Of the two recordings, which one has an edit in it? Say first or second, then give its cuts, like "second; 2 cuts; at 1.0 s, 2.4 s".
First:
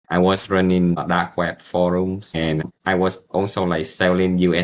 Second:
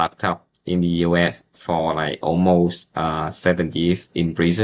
first; 2 cuts; at 1.0 s, 2.6 s